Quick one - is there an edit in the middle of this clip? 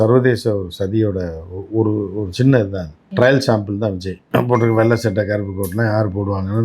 no; 0 cuts

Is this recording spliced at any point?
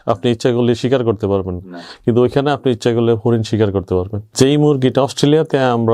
yes; 1 cut; at 4.2 s

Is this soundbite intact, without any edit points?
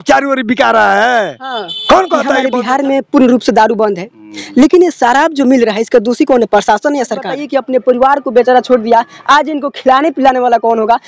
no; 2 cuts; at 2.5 s, 7.4 s

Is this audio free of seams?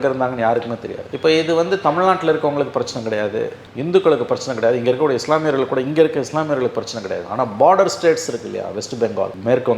yes; 0 cuts

